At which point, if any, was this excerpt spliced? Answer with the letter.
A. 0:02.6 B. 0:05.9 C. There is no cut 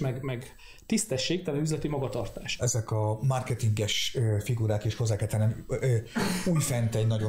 A